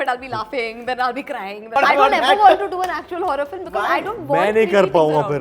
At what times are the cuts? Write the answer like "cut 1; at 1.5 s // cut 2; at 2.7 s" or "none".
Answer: cut 1; at 1.8 s